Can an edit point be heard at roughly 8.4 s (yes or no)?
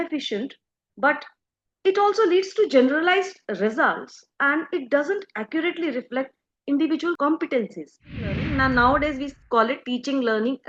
yes